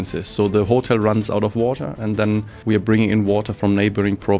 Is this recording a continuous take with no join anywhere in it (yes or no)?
no